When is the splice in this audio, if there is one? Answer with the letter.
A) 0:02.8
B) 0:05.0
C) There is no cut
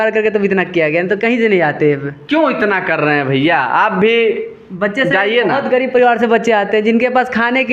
C